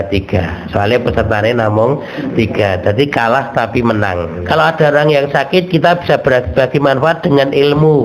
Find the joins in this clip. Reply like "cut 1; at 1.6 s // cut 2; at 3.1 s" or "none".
cut 1; at 4.3 s